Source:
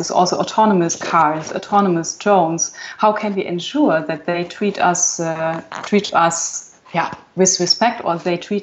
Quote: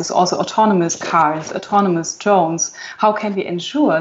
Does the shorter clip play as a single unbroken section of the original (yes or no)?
yes